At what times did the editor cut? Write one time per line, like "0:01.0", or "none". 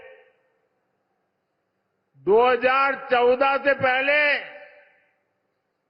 none

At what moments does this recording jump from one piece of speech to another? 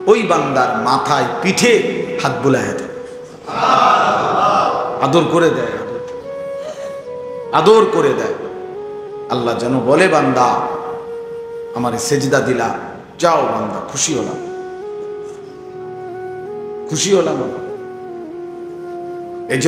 none

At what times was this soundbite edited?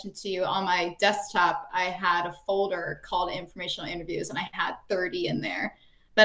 none

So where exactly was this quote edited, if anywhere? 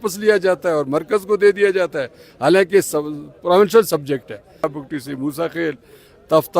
0:04.7

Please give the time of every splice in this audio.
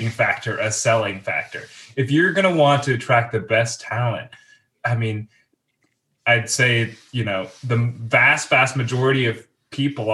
0:05.5

